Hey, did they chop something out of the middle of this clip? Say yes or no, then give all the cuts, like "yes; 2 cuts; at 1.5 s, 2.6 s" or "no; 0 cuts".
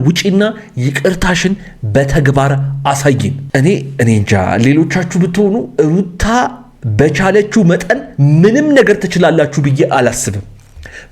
yes; 1 cut; at 3.4 s